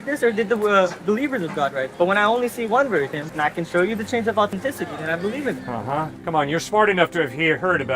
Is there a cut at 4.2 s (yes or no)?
no